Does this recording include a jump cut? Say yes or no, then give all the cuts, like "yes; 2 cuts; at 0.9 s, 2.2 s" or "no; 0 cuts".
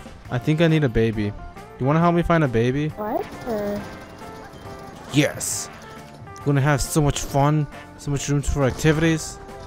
yes; 1 cut; at 3.6 s